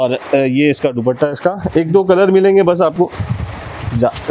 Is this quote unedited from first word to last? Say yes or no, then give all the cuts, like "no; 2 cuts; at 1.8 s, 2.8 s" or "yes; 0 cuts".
yes; 0 cuts